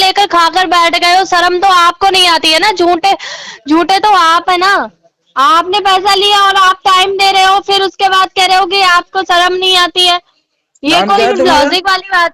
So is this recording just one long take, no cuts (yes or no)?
yes